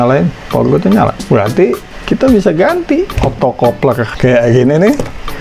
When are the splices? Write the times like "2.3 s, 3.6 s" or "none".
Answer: none